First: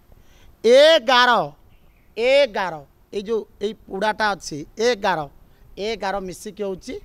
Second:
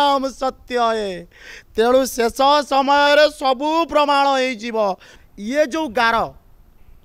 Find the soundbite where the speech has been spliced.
second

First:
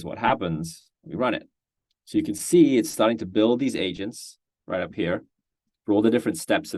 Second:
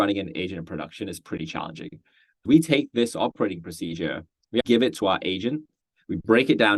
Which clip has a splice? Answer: second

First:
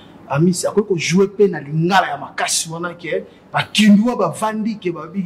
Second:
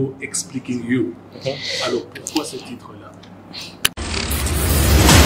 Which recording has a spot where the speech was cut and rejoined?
second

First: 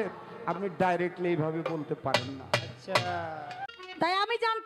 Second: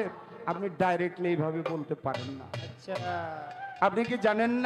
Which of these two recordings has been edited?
first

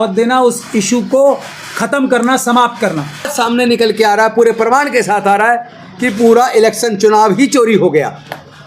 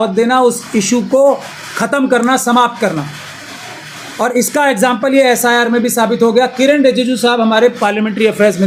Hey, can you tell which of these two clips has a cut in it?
first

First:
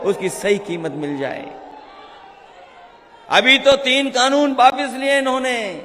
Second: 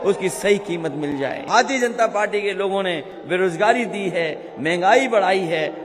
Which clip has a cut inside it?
second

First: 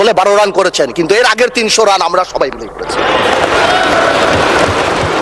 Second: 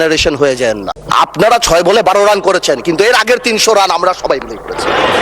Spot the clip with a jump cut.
second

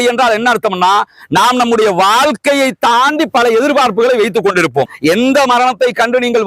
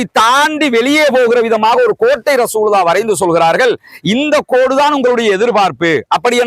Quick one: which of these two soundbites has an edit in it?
first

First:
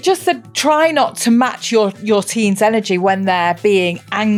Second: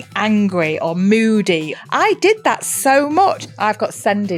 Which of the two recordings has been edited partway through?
second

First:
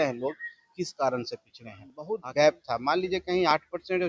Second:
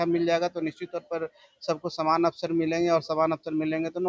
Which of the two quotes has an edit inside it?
first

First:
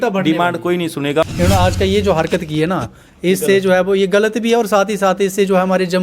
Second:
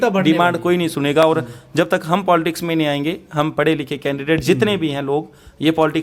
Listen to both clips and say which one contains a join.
first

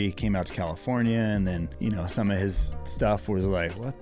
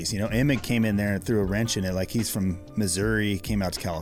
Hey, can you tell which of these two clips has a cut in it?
first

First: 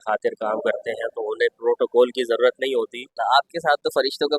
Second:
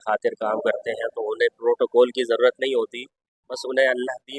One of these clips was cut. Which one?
first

